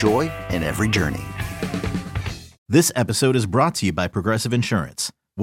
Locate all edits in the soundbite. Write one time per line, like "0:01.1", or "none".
0:02.6

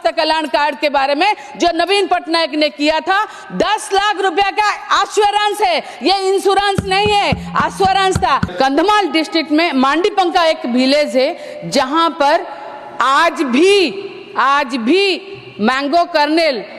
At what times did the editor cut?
0:08.5

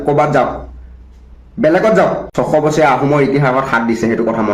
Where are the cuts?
0:02.4

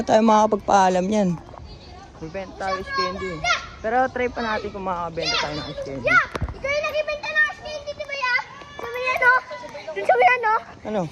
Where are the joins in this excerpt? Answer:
none

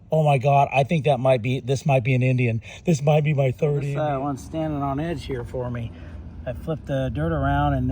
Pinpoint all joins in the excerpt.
0:03.9

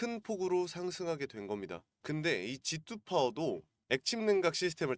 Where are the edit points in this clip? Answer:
0:01.9
0:03.7

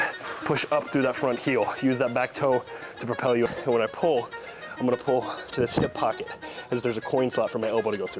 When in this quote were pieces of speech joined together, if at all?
0:03.5

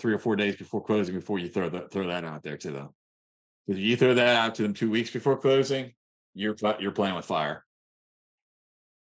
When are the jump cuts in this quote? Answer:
none

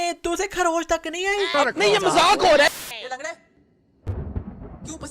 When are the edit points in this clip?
0:01.5
0:02.7

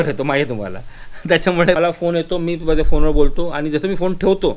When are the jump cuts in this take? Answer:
0:01.8

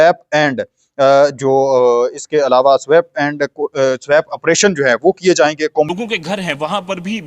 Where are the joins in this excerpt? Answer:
0:05.9

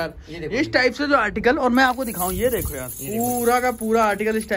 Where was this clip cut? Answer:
none

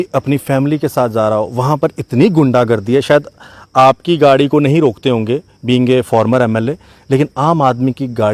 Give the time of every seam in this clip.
none

